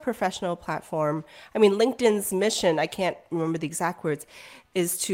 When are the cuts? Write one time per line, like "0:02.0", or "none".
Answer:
none